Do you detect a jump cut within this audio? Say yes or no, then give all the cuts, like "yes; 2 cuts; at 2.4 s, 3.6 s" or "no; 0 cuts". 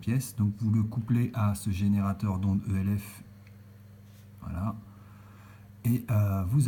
yes; 1 cut; at 4.1 s